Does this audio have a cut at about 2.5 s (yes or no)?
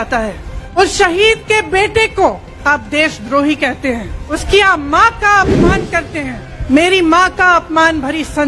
yes